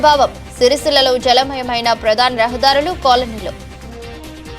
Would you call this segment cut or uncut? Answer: uncut